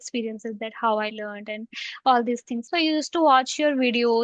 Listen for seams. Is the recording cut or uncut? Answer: cut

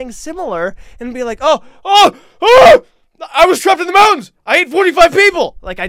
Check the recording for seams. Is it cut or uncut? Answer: uncut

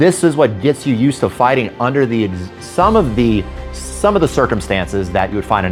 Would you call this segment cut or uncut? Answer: uncut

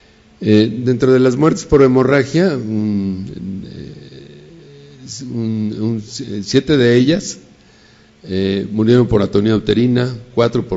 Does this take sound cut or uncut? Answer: cut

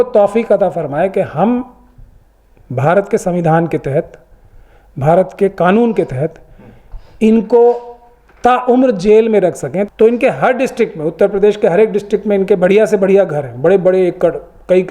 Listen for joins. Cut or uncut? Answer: cut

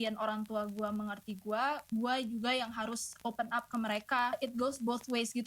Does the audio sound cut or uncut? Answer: cut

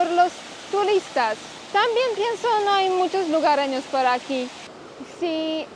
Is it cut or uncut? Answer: cut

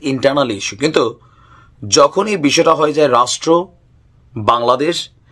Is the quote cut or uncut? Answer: uncut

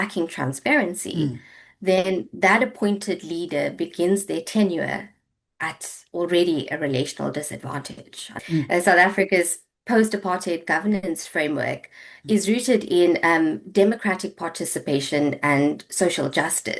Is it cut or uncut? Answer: cut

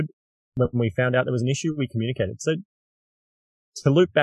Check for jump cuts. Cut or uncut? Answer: uncut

